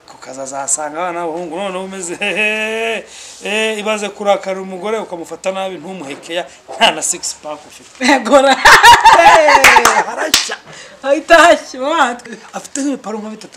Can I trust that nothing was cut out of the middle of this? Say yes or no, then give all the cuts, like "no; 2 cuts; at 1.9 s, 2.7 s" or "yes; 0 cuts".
no; 1 cut; at 12.2 s